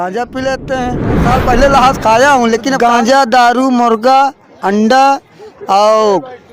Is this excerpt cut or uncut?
cut